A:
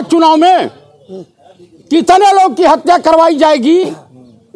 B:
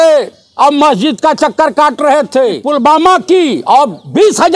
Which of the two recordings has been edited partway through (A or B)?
B